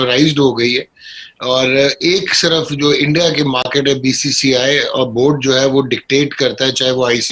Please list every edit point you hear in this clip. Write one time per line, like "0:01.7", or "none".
none